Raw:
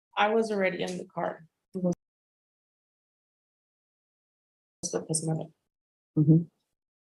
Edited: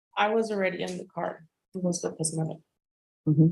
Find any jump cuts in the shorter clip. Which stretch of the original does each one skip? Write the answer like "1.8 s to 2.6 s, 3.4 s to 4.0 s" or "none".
2.0 s to 4.9 s